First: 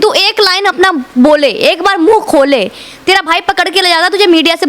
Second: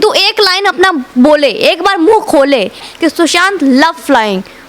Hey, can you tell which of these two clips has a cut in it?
second; 1 cut; at 2.9 s

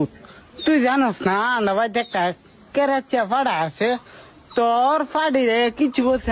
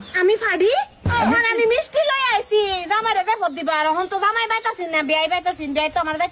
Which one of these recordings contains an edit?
second; 1 cut; at 1.0 s

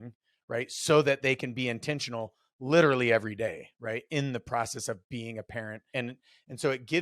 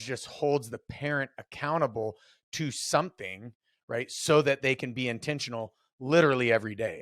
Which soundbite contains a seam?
first; 1 cut; at 5.8 s

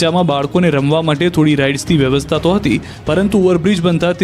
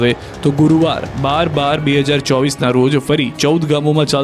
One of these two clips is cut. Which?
first; 1 cut; at 2.9 s

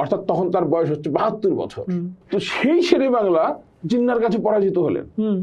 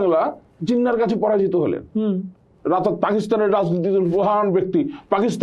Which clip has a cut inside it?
first; 1 cut; at 2.1 s

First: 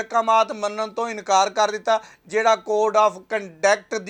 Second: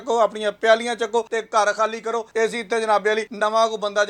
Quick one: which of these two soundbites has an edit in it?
second; 3 cuts; at 1.4 s, 2.3 s, 3.3 s

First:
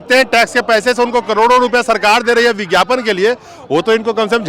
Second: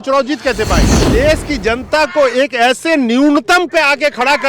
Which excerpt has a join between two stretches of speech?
second; 1 cut; at 0.9 s

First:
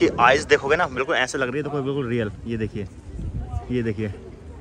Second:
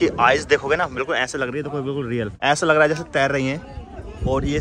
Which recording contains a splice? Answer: second; 1 cut; at 2.3 s

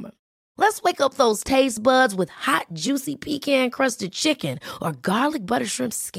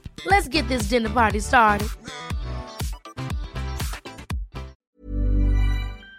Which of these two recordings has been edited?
second; 1 cut; at 4.8 s

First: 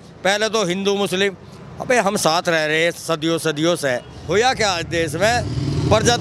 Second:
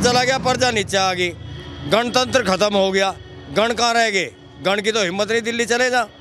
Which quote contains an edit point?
first; 1 cut; at 4.1 s

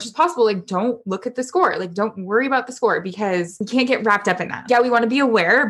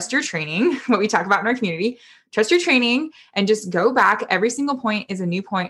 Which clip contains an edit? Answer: first; 1 cut; at 4.6 s

